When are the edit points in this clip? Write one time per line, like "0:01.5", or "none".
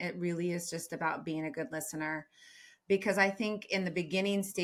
none